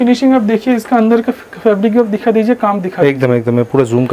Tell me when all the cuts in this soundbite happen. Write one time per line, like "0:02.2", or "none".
none